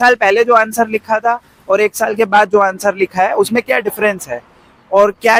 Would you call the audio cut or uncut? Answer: uncut